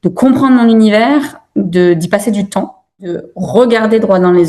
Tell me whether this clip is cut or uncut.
cut